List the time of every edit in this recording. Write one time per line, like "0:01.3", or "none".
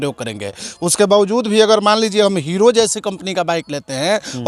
none